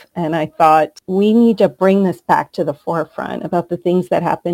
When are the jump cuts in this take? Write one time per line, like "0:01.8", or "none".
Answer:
0:01.0